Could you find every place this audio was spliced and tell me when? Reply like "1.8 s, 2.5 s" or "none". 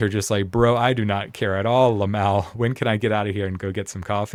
none